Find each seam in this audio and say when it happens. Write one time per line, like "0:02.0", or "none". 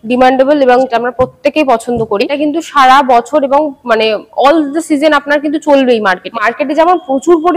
0:00.9
0:02.3
0:06.4